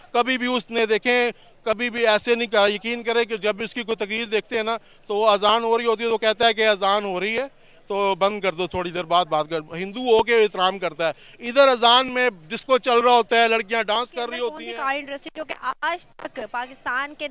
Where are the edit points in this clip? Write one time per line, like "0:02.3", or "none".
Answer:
0:14.6